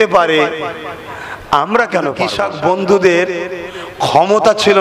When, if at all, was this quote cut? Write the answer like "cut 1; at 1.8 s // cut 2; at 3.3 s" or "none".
cut 1; at 2.3 s